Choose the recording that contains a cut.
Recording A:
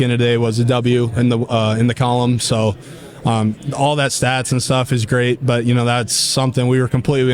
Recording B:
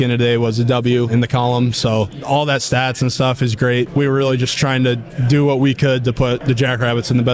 B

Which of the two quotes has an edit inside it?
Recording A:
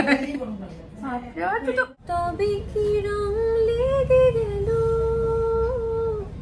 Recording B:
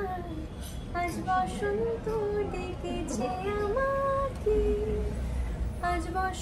A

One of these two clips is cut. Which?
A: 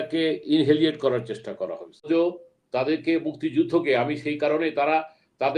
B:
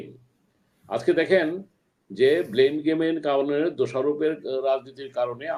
A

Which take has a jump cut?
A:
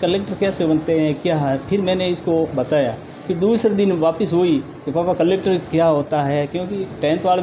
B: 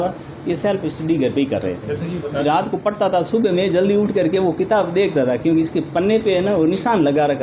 B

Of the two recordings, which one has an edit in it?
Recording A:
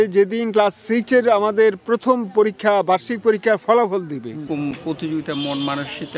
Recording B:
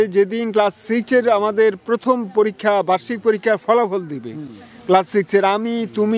A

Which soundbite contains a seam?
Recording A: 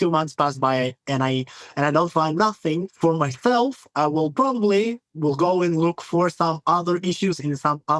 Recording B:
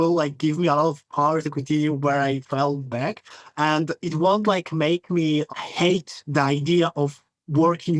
A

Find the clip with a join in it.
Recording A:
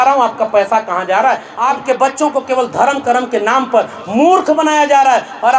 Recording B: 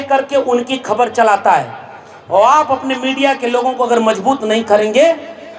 A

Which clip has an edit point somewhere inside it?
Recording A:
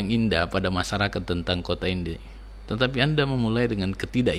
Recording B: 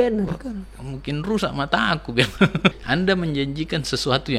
B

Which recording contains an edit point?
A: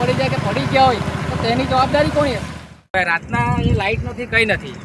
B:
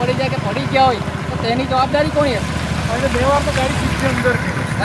A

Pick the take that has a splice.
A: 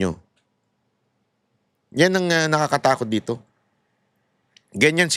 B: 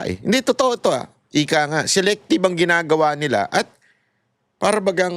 B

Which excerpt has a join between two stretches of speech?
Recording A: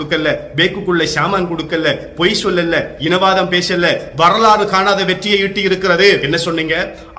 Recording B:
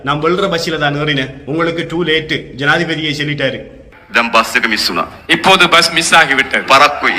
A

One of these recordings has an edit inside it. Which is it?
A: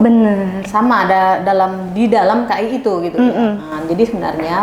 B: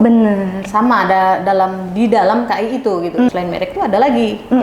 B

